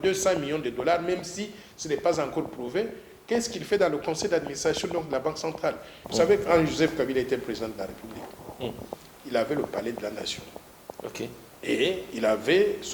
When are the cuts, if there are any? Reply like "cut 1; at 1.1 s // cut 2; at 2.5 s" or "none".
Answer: cut 1; at 6.0 s